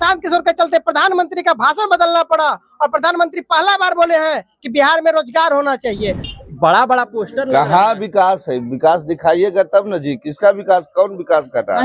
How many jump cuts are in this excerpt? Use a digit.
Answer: 1